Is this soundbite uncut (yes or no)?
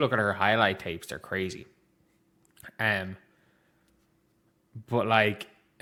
yes